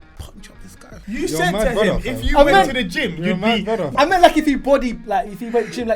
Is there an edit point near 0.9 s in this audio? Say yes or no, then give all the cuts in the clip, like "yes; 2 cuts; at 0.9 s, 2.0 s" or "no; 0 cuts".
yes; 2 cuts; at 0.9 s, 3.9 s